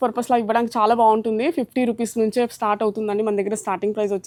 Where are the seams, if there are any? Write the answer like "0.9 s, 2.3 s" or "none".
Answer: none